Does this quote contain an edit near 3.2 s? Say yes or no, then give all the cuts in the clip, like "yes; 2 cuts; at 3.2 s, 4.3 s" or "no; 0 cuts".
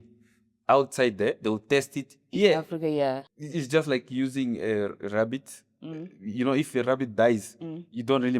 yes; 1 cut; at 3.2 s